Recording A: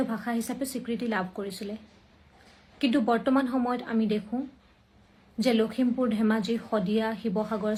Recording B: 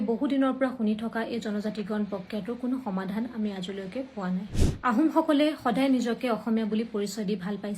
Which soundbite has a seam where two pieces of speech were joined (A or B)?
B